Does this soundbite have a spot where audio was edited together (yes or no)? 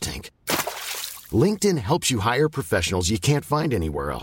no